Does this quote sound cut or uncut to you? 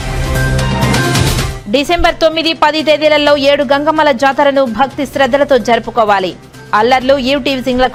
uncut